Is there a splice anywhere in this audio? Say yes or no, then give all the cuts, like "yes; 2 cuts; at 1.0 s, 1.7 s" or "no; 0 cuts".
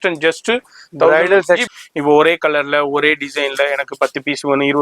yes; 1 cut; at 1.6 s